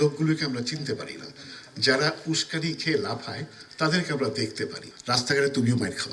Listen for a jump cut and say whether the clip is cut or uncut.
cut